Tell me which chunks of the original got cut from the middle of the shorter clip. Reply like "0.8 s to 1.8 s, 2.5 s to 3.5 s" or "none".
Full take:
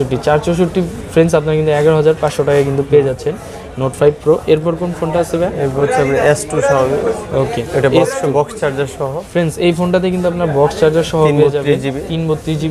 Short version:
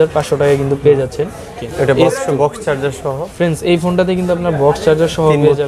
3.7 s to 7.6 s

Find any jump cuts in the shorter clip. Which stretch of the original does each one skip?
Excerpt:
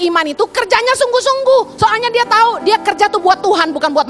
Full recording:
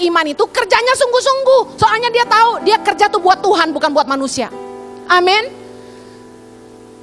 none

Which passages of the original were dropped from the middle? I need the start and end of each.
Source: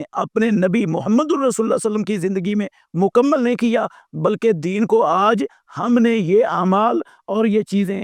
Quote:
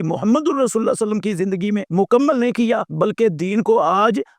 2.7 s to 2.9 s, 3.9 s to 4.1 s

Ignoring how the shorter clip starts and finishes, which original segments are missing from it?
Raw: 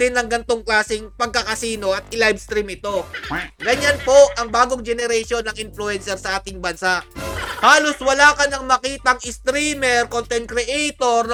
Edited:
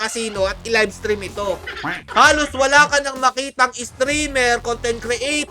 3.5 s to 7.5 s

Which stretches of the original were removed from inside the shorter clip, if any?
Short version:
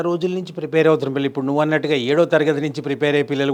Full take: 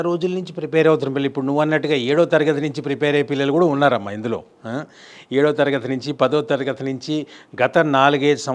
none

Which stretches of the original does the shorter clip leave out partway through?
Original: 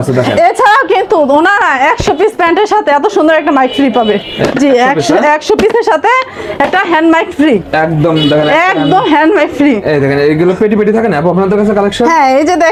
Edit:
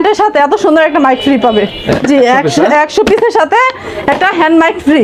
none

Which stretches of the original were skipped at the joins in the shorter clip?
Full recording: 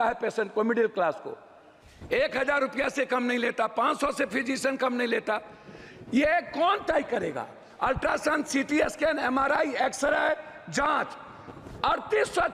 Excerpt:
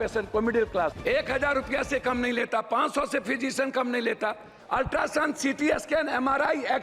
1.2 s to 2.0 s, 5.6 s to 7.6 s

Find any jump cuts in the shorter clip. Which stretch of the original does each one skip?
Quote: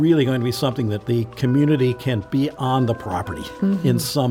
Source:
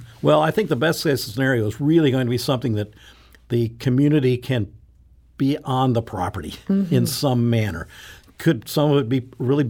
2.8 s to 3.4 s, 4.7 s to 5.3 s

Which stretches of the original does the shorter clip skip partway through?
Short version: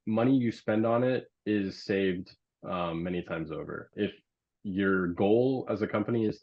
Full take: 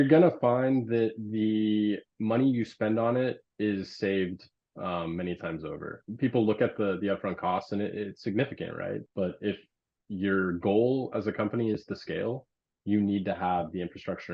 6.0 s to 9.4 s

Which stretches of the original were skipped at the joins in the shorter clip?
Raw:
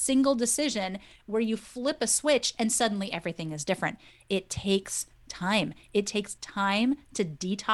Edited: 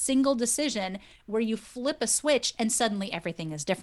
none

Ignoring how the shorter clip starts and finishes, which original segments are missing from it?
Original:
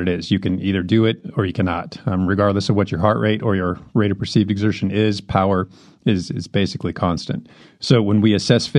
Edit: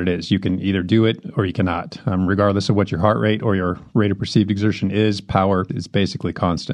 5.8 s to 6.4 s

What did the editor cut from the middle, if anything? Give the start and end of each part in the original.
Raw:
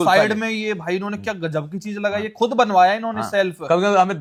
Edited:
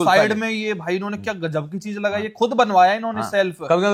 none

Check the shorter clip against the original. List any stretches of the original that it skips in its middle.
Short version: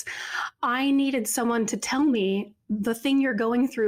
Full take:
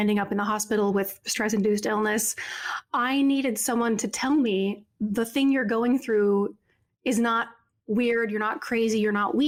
none

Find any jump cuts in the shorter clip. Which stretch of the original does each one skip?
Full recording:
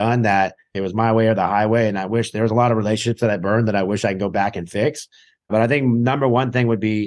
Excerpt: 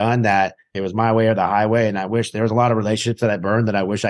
none

